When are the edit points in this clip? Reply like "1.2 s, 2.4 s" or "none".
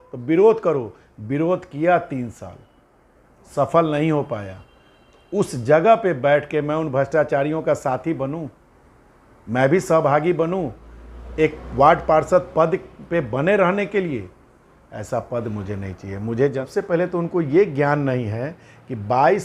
16.6 s